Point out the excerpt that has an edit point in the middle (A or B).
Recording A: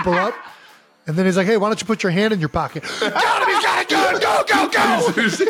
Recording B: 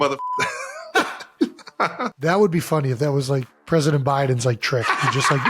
B